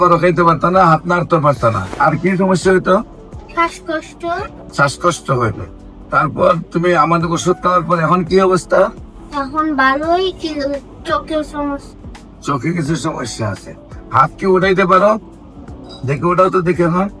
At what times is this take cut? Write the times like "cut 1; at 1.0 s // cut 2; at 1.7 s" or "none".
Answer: cut 1; at 1.9 s // cut 2; at 4.6 s